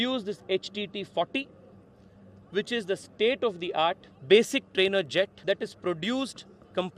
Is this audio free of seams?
no; 2 cuts; at 4.1 s, 5.4 s

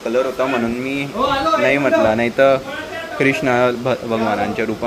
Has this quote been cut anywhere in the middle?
no; 0 cuts

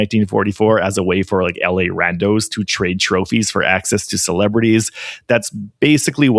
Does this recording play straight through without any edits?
yes; 0 cuts

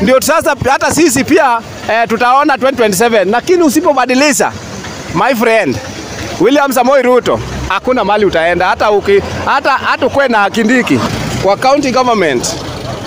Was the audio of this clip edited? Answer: yes; 1 cut; at 11.0 s

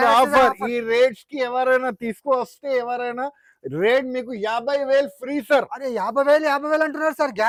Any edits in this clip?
no; 0 cuts

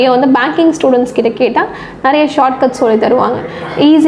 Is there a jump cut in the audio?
no; 0 cuts

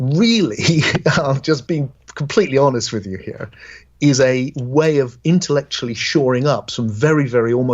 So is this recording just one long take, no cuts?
no; 1 cut; at 1.8 s

